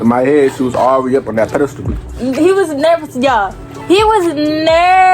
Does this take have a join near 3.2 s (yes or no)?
no